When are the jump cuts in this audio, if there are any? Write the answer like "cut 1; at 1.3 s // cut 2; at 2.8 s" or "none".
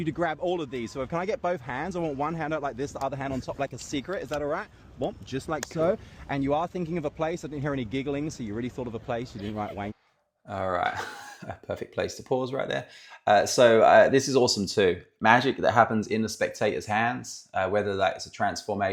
none

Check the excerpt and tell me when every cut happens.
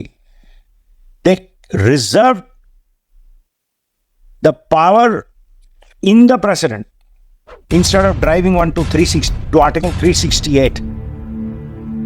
cut 1; at 10.8 s

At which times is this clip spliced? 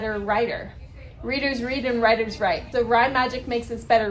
none

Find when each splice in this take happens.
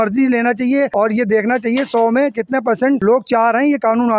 cut 1; at 0.9 s // cut 2; at 3.0 s

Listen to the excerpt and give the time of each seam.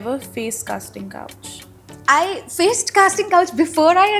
cut 1; at 1.9 s

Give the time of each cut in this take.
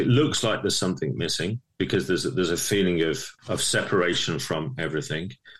cut 1; at 3.3 s

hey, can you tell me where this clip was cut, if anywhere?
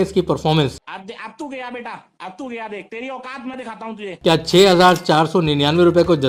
none

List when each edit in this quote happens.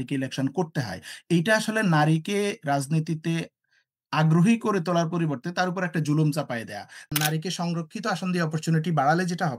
cut 1; at 7.0 s

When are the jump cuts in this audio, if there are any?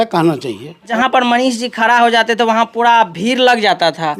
cut 1; at 0.9 s

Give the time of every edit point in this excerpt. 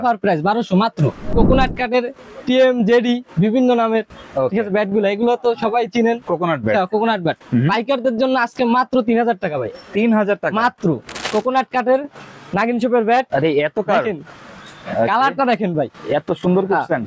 cut 1; at 1.3 s // cut 2; at 11.1 s

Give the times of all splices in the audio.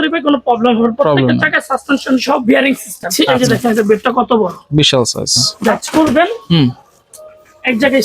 cut 1; at 3.3 s // cut 2; at 5.8 s

